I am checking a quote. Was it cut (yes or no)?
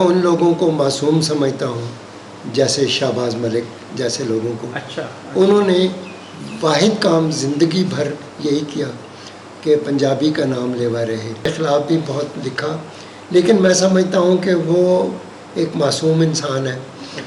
yes